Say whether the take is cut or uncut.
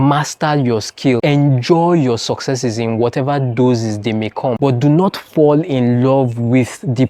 uncut